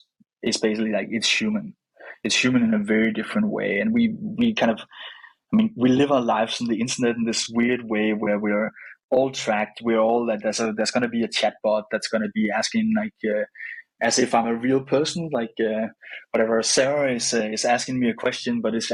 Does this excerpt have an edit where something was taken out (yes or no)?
no